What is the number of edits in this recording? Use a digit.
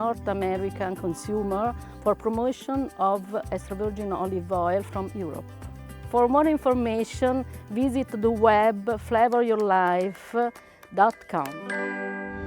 1